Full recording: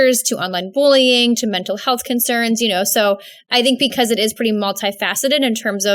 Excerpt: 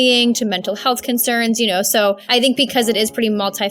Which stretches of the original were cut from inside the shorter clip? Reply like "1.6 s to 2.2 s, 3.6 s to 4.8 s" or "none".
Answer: 3.2 s to 3.4 s